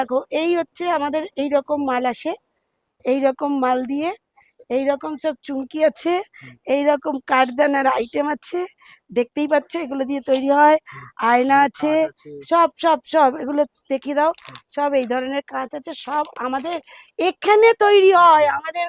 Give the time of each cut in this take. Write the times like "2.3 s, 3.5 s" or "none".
none